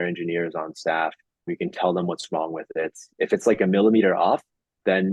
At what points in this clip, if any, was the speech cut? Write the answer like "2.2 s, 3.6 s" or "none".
none